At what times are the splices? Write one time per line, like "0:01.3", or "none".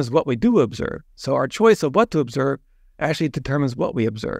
none